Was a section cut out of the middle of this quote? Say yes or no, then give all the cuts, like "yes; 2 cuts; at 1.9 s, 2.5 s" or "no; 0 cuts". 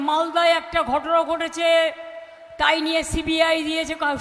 no; 0 cuts